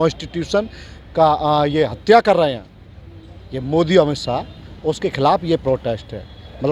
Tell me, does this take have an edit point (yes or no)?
no